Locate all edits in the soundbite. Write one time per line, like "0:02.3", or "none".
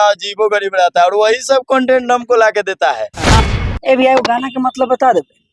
0:03.4